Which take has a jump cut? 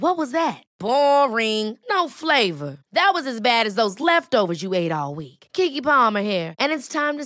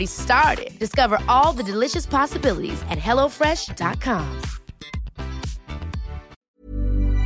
second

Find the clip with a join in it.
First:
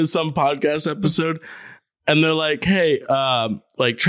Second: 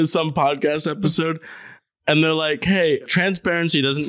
second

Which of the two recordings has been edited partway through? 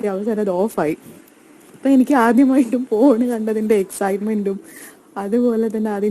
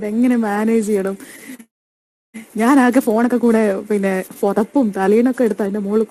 first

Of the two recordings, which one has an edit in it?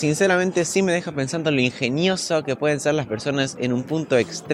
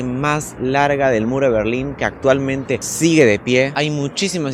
second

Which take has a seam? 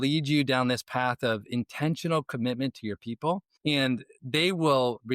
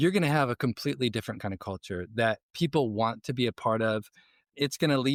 first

